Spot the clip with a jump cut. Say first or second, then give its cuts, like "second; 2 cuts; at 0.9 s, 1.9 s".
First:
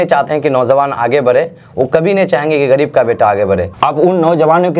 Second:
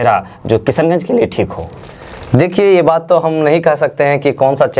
first; 1 cut; at 3.7 s